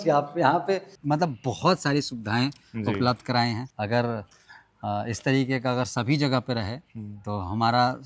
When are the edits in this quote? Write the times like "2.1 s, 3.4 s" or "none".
0.9 s